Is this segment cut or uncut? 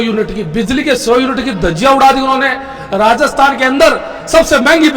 uncut